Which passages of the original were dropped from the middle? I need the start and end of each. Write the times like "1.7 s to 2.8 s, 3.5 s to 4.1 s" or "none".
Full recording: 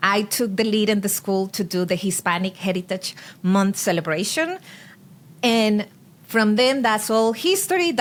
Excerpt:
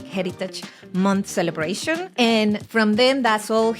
4.6 s to 5.3 s, 5.9 s to 6.2 s